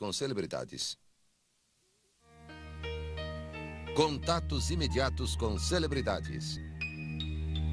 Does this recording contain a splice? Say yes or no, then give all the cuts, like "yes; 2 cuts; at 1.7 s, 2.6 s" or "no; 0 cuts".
yes; 1 cut; at 4.7 s